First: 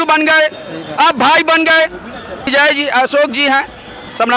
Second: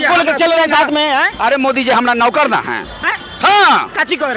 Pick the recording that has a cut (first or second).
first